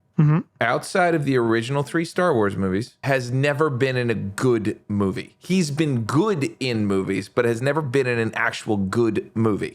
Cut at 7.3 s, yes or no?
no